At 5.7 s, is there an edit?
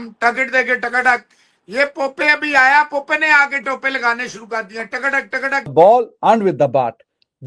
yes; 1 cut; at 5.7 s

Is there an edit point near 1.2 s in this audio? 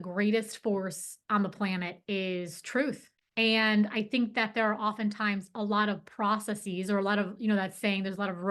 no; 1 cut; at 3.1 s

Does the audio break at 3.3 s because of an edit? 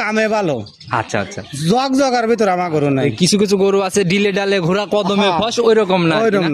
no; 0 cuts

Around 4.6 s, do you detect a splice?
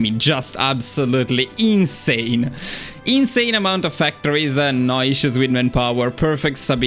no; 0 cuts

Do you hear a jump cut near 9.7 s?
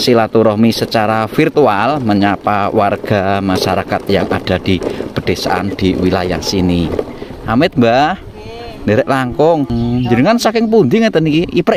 yes; 1 cut; at 9.7 s

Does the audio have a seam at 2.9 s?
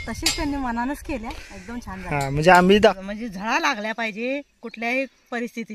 yes; 1 cut; at 2.9 s

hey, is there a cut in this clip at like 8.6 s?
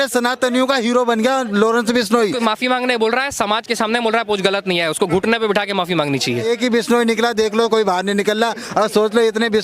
no; 2 cuts; at 2.4 s, 6.4 s

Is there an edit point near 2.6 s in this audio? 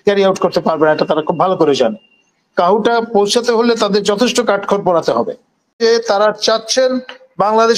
no; 1 cut; at 5.8 s

